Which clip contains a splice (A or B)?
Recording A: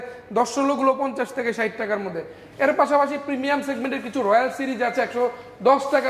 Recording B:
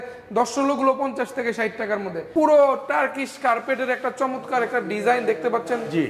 B